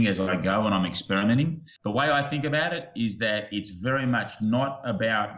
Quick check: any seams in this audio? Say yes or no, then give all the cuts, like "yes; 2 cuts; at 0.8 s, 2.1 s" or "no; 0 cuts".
yes; 1 cut; at 1.7 s